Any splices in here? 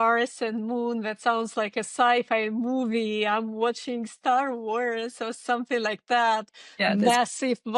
no; 0 cuts

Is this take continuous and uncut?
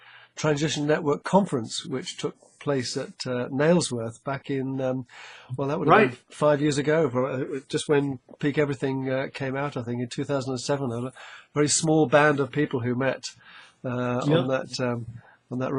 yes; 0 cuts

